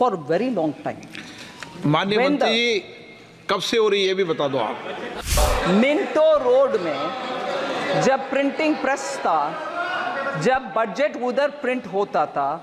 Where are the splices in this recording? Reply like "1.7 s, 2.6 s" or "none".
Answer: 5.2 s

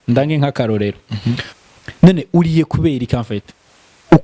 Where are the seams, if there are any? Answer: 1.5 s

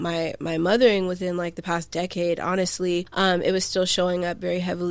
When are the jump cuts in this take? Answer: 3.1 s

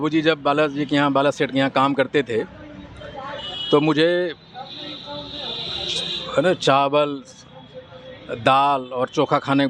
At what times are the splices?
none

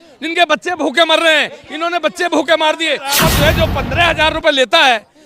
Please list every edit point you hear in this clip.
3.2 s

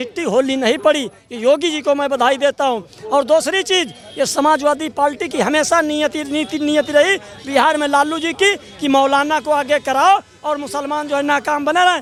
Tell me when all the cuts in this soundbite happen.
none

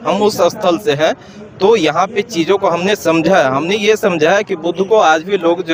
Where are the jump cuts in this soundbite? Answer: none

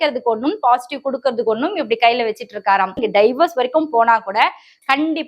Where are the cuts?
3.0 s

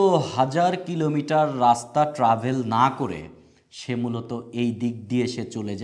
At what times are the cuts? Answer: none

